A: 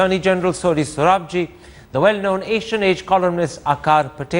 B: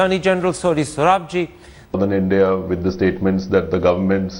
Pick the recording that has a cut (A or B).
A